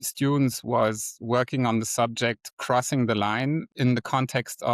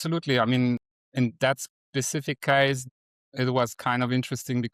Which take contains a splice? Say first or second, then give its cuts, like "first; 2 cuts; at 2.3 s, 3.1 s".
first; 1 cut; at 3.7 s